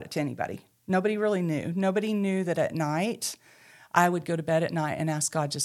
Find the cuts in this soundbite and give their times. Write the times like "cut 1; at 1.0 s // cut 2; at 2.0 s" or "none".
none

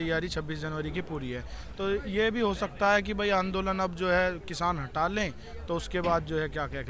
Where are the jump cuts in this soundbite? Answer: none

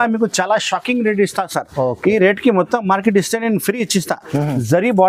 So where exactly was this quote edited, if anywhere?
none

